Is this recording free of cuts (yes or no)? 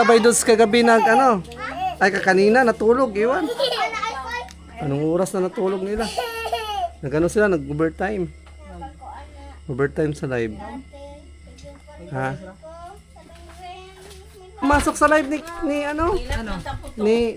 no